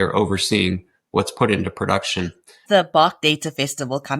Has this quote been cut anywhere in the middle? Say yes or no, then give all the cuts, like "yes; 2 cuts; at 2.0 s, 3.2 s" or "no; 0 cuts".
yes; 1 cut; at 2.6 s